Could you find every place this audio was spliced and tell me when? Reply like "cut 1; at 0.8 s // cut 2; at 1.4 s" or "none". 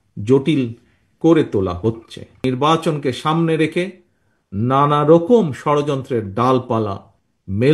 cut 1; at 2.4 s